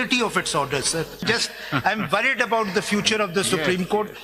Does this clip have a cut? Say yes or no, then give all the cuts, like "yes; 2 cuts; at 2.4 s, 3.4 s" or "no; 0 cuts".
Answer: yes; 1 cut; at 1.2 s